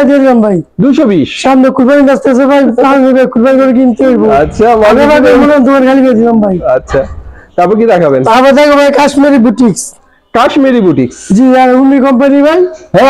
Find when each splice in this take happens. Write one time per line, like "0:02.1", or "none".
none